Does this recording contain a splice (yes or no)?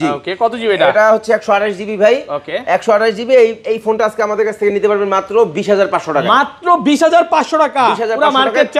no